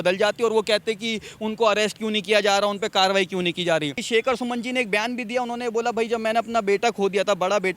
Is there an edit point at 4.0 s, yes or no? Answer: yes